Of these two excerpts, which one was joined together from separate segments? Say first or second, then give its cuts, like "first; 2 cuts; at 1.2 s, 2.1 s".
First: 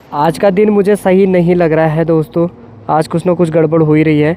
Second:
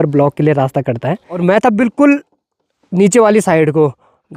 second; 1 cut; at 1.4 s